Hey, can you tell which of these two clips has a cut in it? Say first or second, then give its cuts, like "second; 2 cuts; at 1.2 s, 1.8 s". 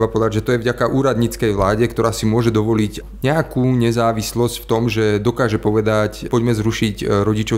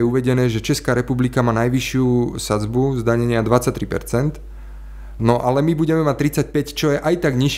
first; 2 cuts; at 3.0 s, 6.2 s